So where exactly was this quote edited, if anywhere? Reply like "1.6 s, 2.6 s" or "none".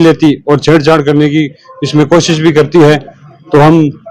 none